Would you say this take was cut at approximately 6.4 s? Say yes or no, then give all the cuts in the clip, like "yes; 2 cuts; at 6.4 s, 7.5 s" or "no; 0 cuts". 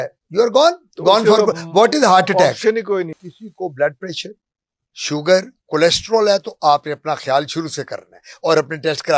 no; 1 cut; at 3.2 s